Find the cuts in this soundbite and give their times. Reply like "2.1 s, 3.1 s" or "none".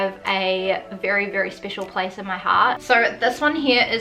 2.8 s

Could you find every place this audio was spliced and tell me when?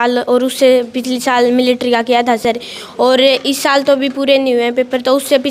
none

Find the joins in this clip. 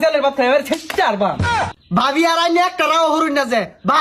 1.6 s

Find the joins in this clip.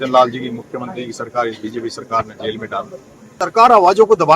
3.2 s

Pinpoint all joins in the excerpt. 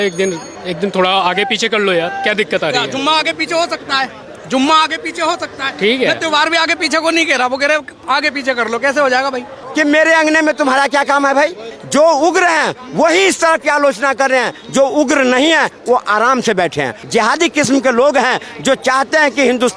9.6 s, 11.7 s, 17.0 s

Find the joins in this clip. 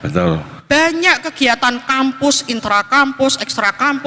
none

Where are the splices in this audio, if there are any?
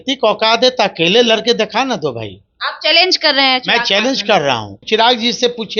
4.8 s

